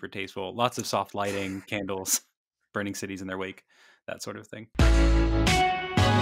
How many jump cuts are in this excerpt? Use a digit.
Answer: 1